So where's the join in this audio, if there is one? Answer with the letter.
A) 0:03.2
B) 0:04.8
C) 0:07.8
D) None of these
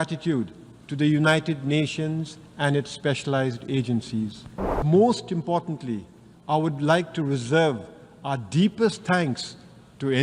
B